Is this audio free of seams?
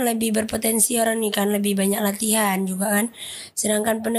yes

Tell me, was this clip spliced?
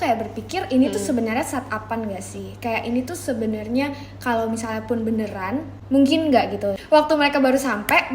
yes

